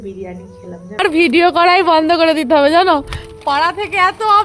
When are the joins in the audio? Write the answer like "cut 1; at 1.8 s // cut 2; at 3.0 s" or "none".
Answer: cut 1; at 1.0 s

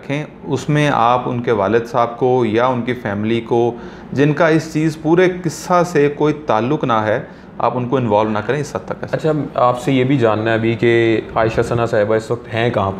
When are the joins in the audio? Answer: none

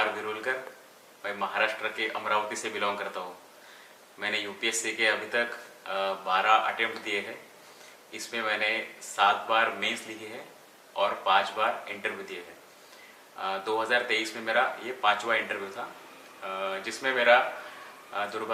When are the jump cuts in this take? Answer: none

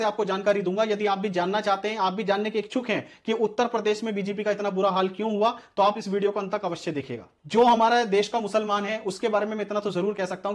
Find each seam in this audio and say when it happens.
cut 1; at 7.2 s

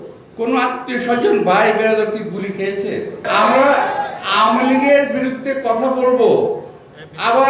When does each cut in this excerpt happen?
cut 1; at 3.2 s

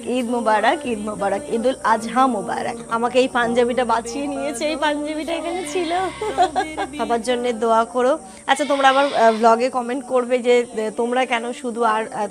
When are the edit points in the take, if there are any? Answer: cut 1; at 2.9 s // cut 2; at 6.8 s

